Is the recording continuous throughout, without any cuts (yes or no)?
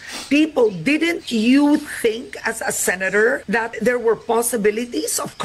no